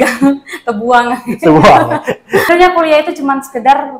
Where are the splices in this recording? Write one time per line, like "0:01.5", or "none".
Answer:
0:02.5

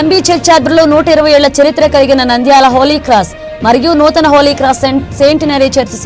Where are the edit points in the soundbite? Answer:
none

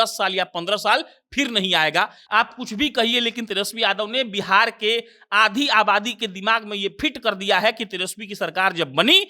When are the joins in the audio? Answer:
0:02.2

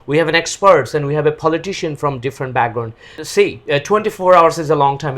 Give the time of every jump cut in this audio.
0:03.1

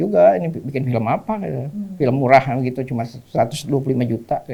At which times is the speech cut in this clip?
none

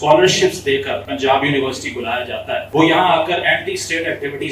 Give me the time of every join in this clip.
0:01.1
0:02.7

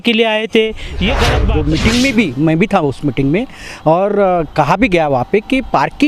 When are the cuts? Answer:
0:01.4

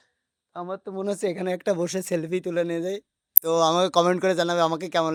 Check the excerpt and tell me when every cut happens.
none

